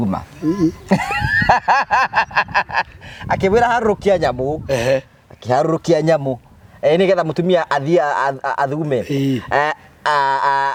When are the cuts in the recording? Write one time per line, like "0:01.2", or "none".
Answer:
none